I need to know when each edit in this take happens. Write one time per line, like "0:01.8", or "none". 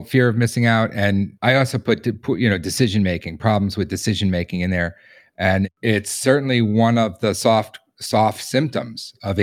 0:01.3
0:05.7

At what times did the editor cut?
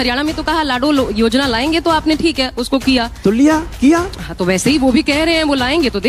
none

